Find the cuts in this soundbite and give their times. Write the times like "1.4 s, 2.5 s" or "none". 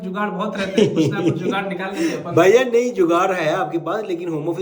none